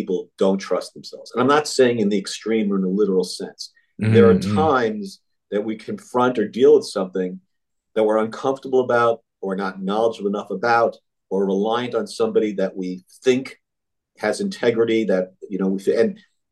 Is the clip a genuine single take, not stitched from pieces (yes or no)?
yes